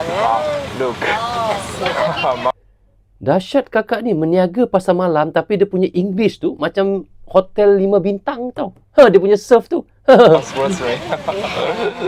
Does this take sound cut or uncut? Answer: uncut